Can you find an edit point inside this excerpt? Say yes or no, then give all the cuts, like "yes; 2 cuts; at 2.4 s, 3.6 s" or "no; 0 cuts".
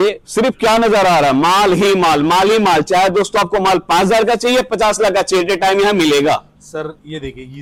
no; 0 cuts